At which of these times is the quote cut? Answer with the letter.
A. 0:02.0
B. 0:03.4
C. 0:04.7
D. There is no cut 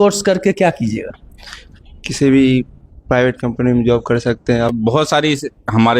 C